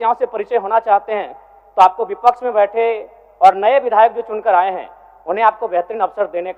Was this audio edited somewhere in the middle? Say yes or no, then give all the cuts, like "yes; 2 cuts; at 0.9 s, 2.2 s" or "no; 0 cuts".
no; 0 cuts